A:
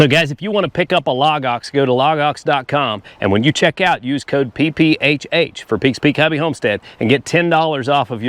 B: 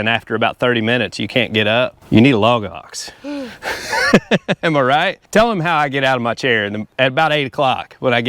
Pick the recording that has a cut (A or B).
B